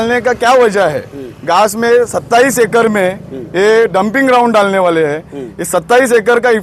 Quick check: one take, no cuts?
yes; 0 cuts

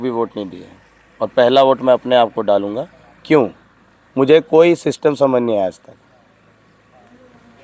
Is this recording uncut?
yes; 0 cuts

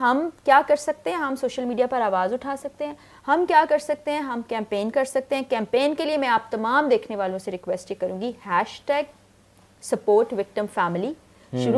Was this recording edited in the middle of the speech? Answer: no; 0 cuts

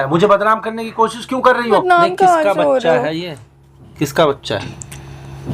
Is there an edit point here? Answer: yes; 1 cut; at 1.8 s

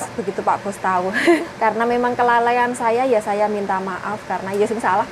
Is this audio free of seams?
no; 1 cut; at 1.4 s

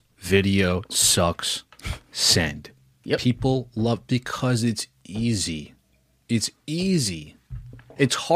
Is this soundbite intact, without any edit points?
yes; 0 cuts

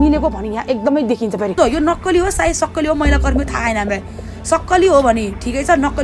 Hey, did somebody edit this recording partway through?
yes; 1 cut; at 1.6 s

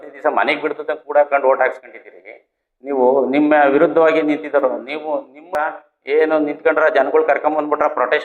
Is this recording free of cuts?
no; 1 cut; at 5.5 s

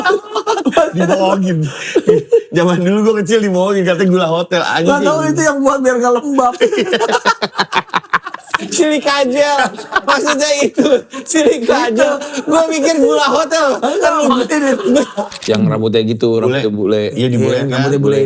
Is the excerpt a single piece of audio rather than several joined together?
no; 1 cut; at 15.3 s

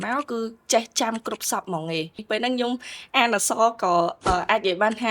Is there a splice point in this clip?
yes; 1 cut; at 2.2 s

